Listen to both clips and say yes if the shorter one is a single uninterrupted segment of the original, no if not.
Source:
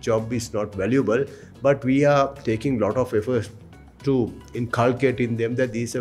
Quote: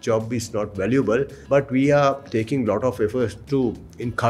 no